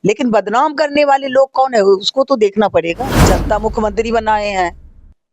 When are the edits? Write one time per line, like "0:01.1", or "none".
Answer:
0:03.2